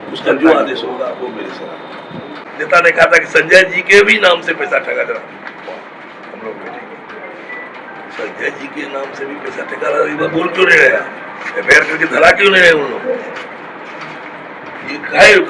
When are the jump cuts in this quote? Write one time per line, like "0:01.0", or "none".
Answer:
0:02.3